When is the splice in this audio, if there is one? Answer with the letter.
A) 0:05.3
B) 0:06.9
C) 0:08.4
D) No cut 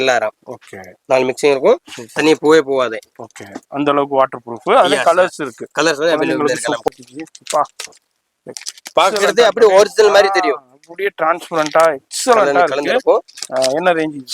B